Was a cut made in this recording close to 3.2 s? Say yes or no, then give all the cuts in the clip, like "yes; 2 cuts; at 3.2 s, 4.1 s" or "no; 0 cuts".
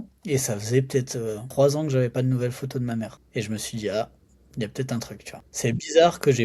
yes; 3 cuts; at 1.4 s, 3.2 s, 5.6 s